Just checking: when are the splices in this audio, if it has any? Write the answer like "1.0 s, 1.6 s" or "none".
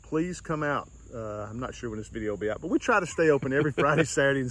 none